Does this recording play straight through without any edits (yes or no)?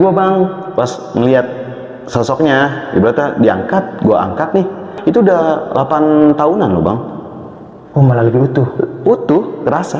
no